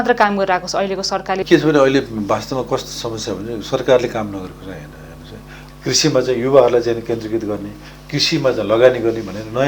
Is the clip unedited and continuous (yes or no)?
no